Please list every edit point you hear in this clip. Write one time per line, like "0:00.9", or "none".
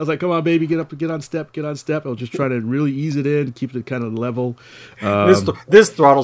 0:05.3